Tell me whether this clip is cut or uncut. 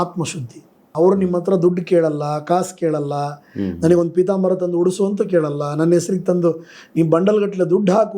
cut